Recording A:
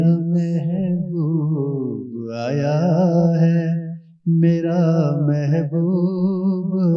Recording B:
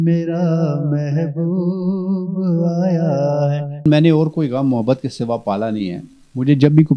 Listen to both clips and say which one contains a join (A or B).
B